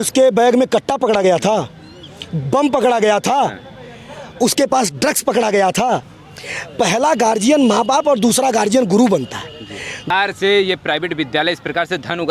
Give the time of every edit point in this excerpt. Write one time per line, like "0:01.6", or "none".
0:06.1
0:10.1

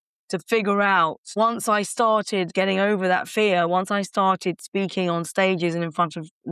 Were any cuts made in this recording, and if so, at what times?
0:01.3
0:02.5

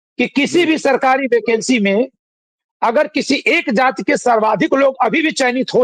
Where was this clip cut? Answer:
none

